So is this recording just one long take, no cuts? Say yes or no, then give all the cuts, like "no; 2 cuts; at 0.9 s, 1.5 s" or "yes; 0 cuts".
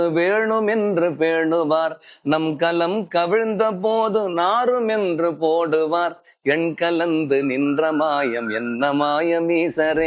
yes; 0 cuts